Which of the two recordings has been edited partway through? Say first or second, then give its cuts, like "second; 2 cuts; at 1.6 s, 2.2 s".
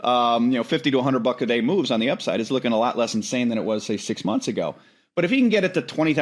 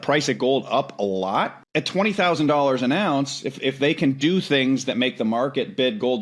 second; 1 cut; at 1.6 s